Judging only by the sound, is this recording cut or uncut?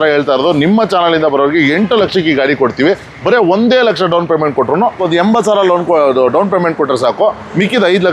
cut